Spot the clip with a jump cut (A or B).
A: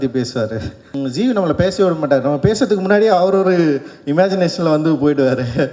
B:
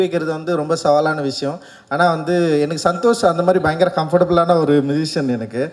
A